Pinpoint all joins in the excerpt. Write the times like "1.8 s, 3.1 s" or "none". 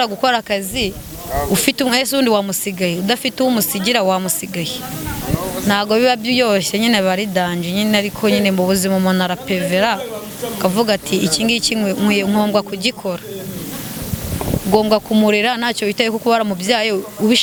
none